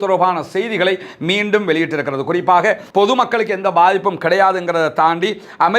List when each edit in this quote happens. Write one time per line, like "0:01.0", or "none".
0:02.8